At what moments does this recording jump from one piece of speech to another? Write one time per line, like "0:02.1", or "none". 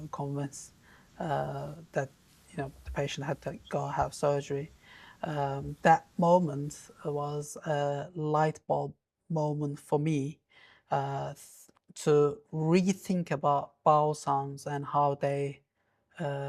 none